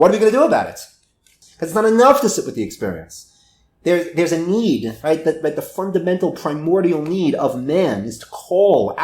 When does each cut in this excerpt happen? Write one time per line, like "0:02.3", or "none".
0:01.3